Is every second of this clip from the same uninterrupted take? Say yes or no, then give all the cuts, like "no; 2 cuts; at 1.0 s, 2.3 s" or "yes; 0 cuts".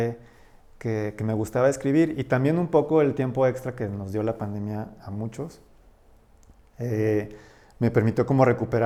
yes; 0 cuts